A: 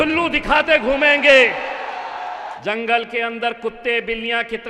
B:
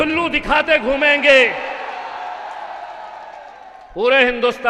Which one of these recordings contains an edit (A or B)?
A